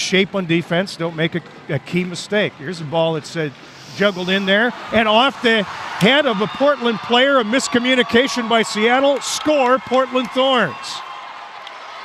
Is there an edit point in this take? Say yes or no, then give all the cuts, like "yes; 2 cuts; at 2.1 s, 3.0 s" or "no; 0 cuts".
no; 0 cuts